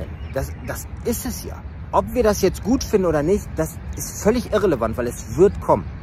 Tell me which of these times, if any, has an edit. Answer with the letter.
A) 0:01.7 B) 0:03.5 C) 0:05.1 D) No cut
A